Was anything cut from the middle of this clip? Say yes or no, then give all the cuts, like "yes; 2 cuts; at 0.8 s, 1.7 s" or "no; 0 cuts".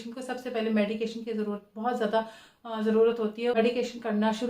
yes; 1 cut; at 3.6 s